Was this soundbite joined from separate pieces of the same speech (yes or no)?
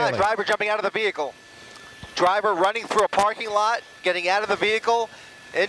no